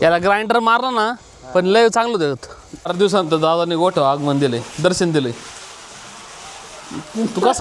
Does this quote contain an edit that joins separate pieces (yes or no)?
yes